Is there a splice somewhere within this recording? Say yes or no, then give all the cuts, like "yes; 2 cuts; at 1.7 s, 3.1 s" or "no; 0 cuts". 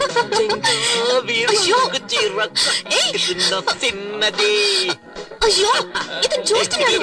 no; 0 cuts